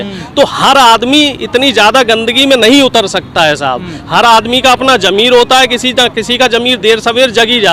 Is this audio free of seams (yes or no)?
yes